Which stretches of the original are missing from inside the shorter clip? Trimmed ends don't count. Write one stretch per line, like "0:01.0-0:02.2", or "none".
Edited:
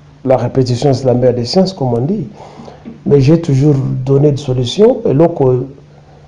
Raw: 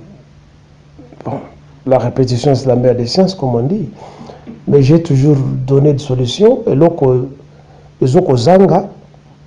none